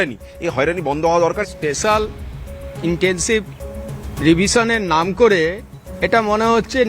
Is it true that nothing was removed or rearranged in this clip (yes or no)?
no